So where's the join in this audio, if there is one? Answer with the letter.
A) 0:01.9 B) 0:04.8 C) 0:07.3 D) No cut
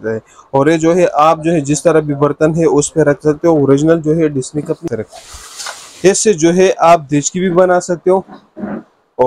B